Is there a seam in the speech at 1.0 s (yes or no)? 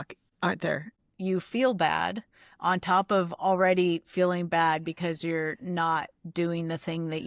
yes